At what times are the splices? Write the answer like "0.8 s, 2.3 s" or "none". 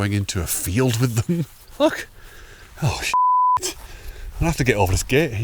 1.6 s

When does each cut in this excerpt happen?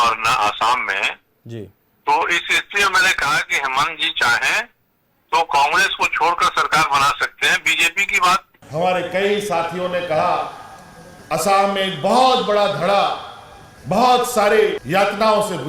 8.6 s

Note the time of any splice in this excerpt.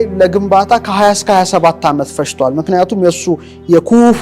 none

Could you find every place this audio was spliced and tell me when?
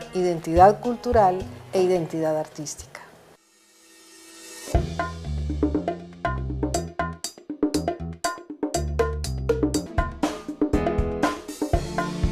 none

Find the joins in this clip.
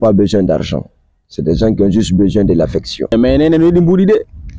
3.1 s

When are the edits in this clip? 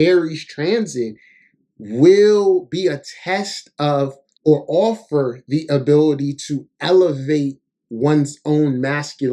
4.2 s

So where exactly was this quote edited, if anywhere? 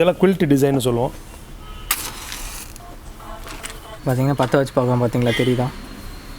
1.2 s

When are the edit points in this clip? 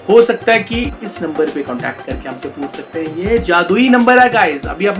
1.0 s

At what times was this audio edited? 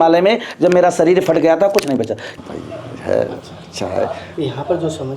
2.2 s

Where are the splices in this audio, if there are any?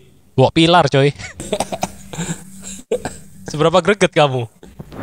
1.4 s

